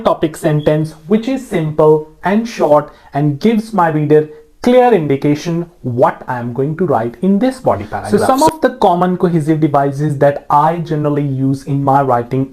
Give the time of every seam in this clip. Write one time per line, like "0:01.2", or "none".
0:07.9